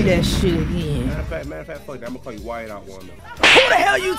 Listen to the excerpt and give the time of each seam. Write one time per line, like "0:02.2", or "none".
0:03.1